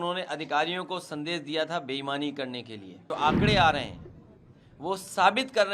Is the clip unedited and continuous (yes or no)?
no